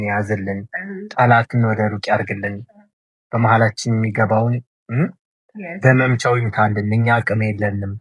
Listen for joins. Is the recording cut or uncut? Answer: uncut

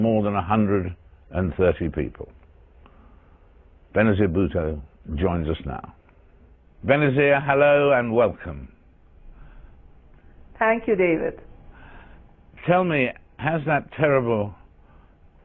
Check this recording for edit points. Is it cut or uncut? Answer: uncut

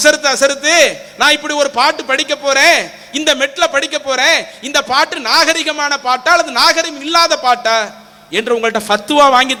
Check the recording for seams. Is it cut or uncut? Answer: uncut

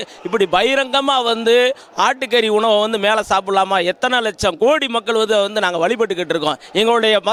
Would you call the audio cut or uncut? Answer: uncut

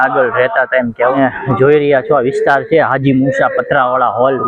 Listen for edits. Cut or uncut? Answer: cut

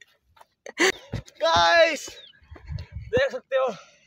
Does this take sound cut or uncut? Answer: cut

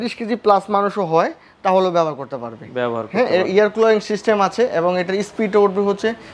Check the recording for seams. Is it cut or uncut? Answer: uncut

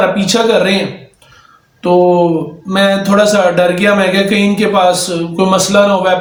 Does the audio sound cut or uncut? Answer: uncut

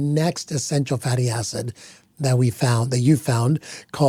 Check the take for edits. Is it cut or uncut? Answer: uncut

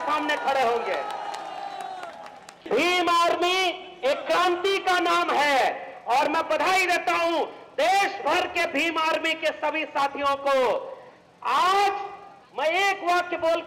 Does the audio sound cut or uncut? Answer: uncut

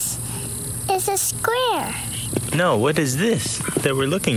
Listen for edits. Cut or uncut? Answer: uncut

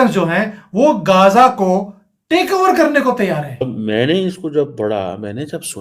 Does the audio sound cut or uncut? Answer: cut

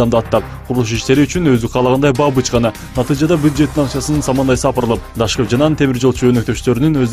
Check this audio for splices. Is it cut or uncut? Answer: cut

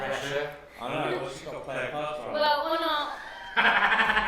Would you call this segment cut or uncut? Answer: uncut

